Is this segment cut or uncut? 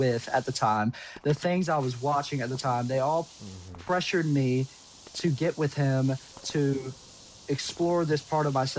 uncut